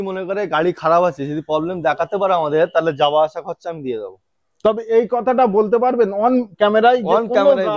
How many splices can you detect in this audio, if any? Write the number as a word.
zero